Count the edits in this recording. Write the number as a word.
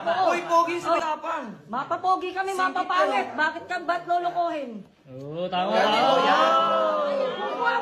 one